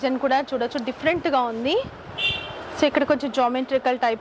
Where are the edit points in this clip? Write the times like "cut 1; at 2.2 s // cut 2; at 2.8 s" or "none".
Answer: none